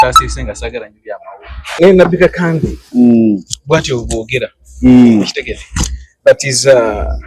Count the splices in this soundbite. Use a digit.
1